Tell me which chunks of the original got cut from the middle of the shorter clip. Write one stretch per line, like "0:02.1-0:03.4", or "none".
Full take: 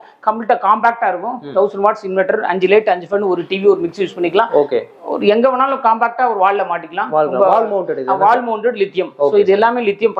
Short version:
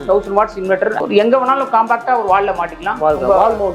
0:02.4-0:05.1